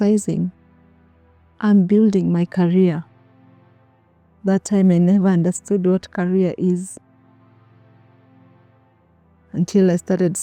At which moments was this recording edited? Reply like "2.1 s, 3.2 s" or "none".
none